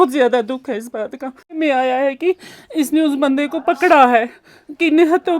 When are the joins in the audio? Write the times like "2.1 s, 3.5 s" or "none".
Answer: 1.6 s